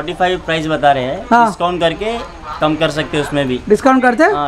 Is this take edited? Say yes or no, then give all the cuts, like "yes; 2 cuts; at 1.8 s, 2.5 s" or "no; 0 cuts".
no; 0 cuts